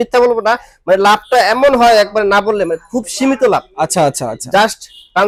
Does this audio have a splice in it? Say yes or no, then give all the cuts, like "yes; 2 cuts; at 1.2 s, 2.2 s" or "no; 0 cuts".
no; 0 cuts